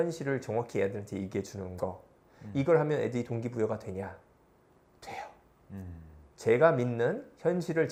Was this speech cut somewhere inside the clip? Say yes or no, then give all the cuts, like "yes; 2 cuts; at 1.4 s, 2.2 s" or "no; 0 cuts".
no; 0 cuts